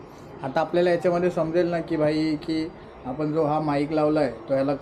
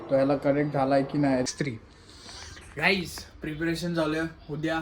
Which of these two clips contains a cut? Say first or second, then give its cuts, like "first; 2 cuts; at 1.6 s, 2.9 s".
second; 1 cut; at 1.5 s